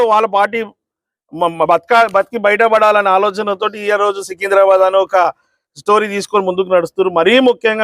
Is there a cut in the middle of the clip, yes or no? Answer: no